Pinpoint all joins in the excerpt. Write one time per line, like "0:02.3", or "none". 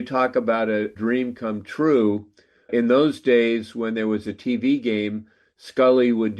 0:00.9
0:02.7